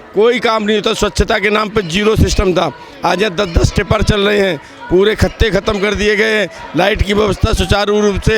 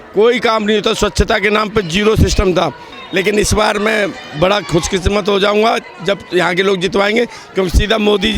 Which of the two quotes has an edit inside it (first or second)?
second